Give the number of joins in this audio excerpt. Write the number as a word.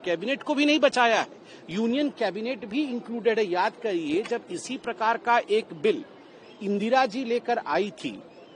zero